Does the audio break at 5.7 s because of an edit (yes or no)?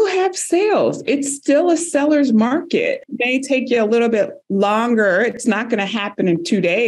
no